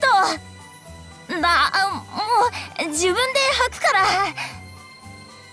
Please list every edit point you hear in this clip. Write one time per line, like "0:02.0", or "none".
0:04.5